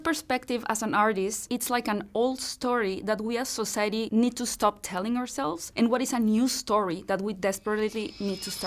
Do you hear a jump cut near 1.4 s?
yes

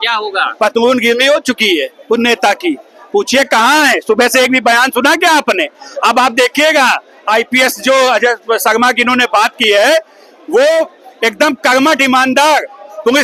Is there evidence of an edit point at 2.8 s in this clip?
no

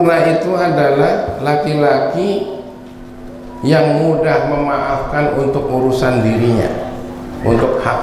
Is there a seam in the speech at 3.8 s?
no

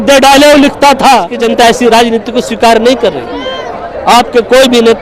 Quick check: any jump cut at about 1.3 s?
yes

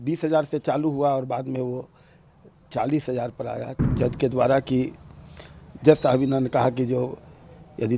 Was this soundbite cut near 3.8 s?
yes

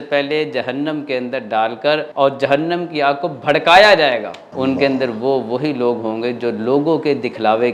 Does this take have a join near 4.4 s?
yes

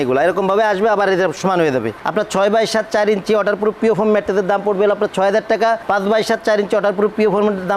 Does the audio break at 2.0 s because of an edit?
yes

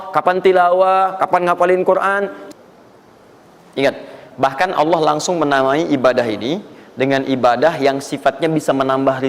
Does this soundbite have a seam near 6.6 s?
no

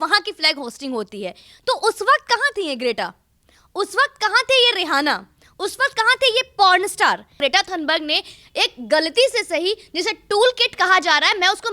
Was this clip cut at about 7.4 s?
yes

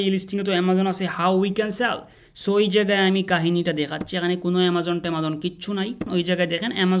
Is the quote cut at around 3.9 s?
no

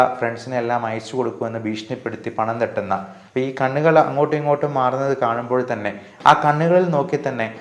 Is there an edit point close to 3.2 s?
yes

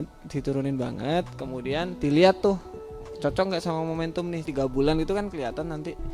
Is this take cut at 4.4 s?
yes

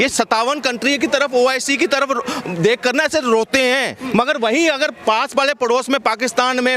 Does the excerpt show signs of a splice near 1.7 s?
no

